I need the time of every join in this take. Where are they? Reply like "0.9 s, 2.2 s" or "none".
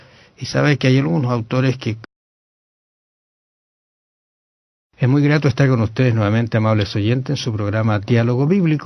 none